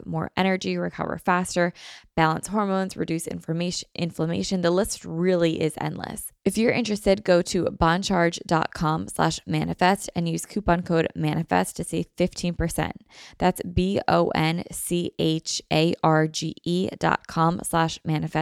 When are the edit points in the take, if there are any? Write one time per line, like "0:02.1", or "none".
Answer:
0:06.2